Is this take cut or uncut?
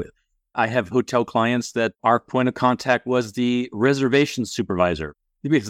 uncut